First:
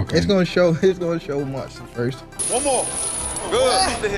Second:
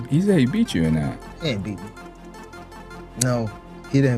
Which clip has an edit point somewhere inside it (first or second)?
first